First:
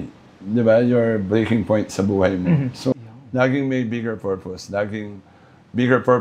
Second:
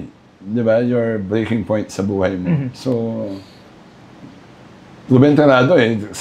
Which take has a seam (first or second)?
first